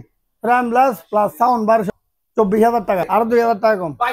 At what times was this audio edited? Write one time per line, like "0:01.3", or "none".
0:01.9
0:03.0

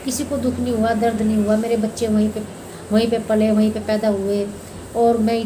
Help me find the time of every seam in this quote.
none

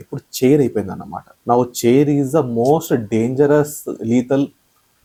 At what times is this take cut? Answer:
none

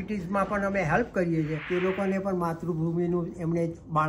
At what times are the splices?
0:01.6

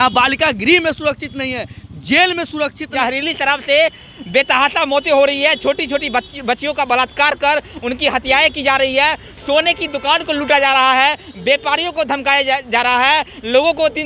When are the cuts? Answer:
0:02.9

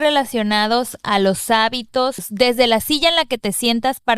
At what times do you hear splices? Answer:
0:02.3

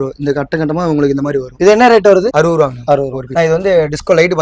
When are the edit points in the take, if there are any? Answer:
0:01.5
0:03.2

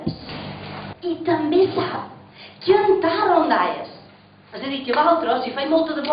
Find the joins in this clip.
0:04.8

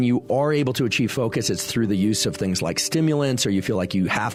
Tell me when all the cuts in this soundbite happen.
none

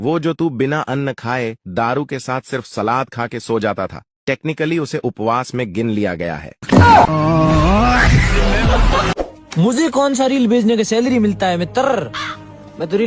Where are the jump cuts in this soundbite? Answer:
0:09.1

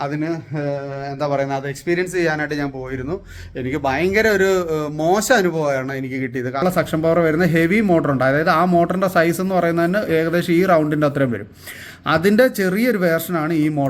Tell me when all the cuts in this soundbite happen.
0:06.6

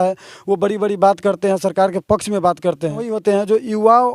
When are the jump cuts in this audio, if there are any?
0:03.1

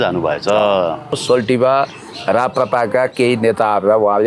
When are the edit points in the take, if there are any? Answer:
0:01.2

